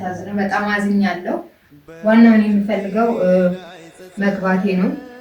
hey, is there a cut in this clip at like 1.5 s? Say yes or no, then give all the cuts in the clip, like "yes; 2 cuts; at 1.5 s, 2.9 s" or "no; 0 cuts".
yes; 1 cut; at 1.5 s